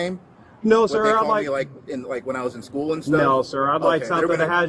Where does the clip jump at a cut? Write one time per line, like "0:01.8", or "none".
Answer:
none

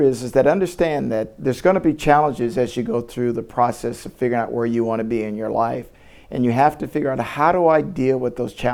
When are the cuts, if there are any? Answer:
none

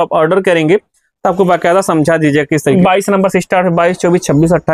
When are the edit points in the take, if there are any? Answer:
0:02.8

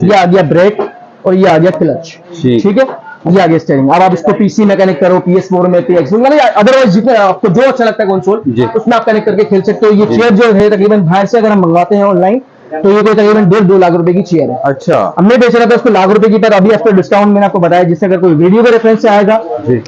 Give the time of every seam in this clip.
none

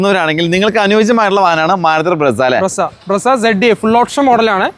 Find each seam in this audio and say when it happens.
none

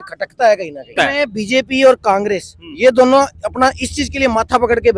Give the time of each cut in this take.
0:01.0

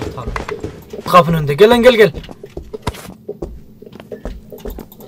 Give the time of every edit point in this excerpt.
0:01.0

